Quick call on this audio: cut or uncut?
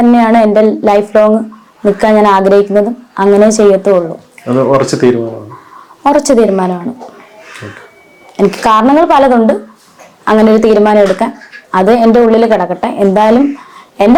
uncut